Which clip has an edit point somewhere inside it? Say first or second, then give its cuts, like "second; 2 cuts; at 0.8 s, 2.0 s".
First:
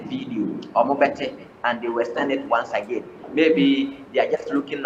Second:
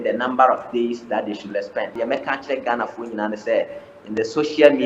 second; 1 cut; at 1.9 s